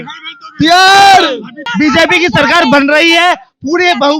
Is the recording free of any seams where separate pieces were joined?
no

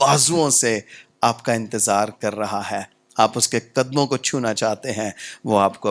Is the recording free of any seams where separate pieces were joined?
yes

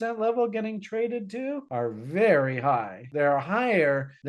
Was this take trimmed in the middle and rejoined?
yes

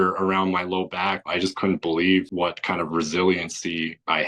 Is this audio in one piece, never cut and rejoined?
no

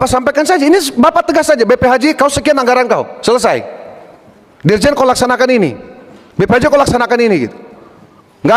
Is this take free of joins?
yes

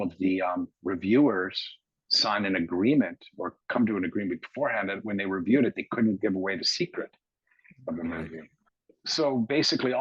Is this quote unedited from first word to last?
no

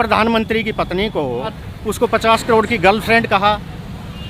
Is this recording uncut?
no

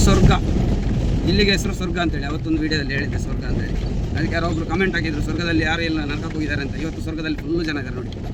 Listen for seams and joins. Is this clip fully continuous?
yes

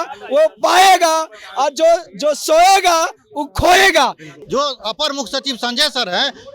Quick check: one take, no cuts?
no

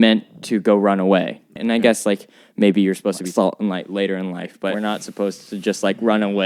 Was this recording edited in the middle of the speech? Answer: yes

